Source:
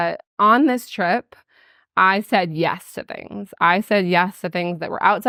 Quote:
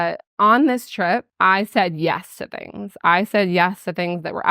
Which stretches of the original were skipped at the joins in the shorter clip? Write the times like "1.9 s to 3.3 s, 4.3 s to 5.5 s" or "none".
1.3 s to 1.9 s